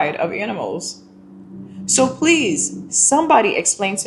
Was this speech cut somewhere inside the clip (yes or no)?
no